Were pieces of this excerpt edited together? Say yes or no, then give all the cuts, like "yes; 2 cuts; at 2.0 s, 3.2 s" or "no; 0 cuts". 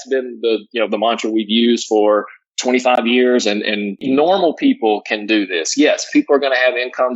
yes; 1 cut; at 4.0 s